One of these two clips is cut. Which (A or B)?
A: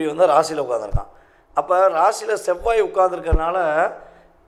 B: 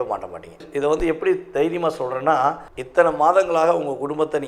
B